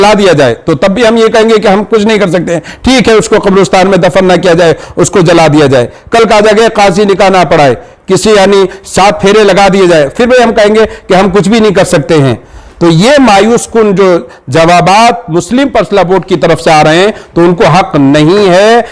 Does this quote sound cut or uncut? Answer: uncut